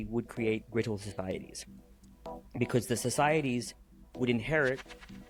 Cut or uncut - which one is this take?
uncut